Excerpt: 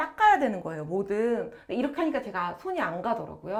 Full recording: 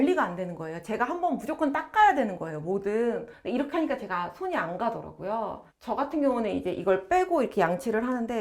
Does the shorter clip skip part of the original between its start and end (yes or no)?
no